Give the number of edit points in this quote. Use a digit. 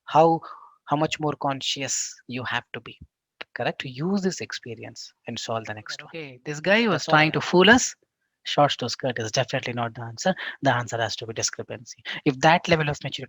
1